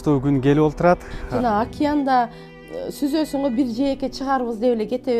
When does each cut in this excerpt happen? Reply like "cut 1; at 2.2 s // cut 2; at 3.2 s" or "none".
cut 1; at 1.2 s